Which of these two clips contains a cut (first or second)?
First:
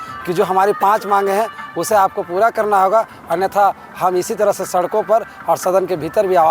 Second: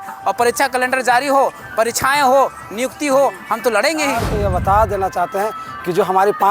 second